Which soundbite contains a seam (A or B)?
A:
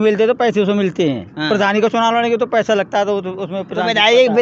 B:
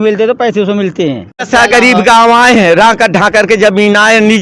B